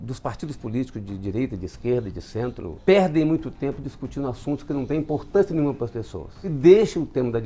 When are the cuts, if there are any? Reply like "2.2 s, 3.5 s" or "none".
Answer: 2.8 s, 6.5 s